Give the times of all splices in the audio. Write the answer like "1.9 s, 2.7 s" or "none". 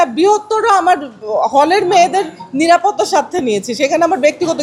none